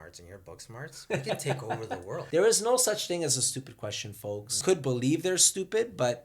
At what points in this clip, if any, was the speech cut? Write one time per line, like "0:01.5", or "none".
0:02.2
0:04.5